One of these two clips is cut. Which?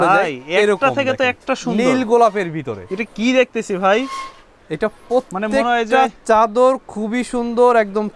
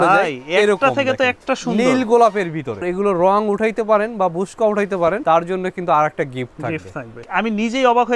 second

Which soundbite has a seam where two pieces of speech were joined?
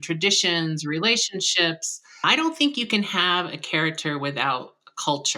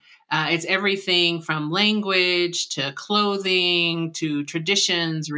first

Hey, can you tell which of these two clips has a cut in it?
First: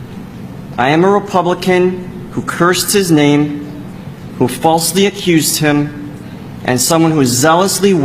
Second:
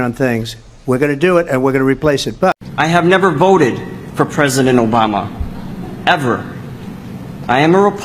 second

